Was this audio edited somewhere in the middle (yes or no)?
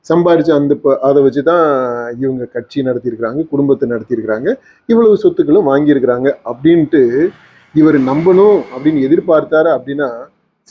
no